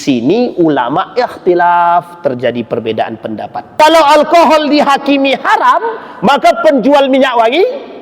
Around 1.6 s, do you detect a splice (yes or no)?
no